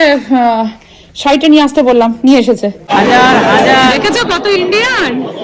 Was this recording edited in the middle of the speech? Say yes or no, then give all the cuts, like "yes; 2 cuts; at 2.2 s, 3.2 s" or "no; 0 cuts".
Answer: yes; 1 cut; at 2.8 s